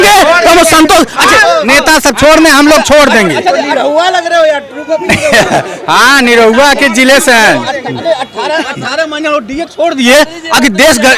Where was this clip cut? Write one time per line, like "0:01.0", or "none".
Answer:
none